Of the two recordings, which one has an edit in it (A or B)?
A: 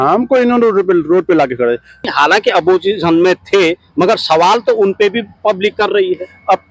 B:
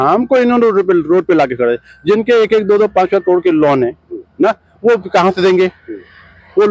A